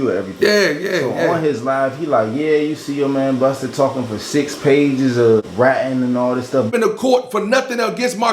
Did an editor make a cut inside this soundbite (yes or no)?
yes